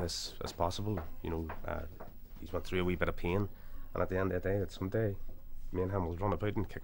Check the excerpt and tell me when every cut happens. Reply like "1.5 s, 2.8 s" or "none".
none